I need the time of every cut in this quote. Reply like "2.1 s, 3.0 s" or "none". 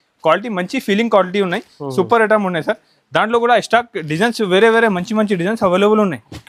none